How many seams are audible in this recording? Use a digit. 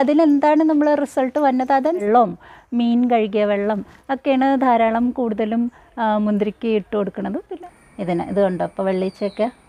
2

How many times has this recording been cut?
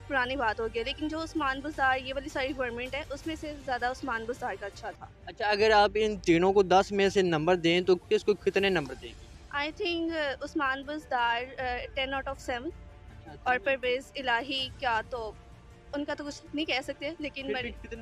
0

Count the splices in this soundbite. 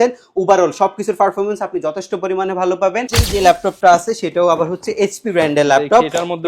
1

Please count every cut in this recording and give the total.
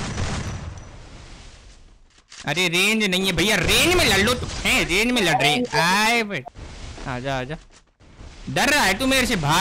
1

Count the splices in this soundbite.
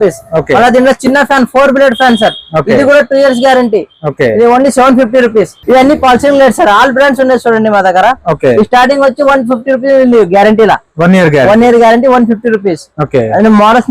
1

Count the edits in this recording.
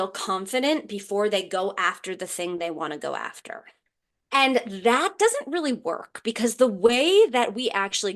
1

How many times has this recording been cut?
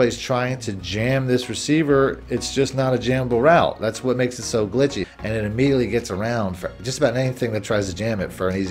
1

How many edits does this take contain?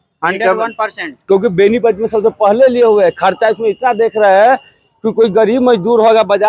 1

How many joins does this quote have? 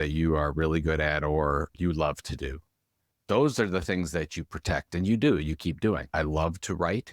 1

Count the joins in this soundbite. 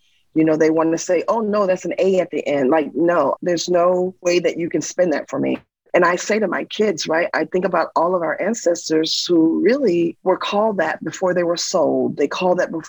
1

